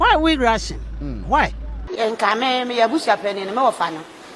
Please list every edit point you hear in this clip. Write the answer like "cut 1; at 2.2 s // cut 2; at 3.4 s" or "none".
cut 1; at 1.9 s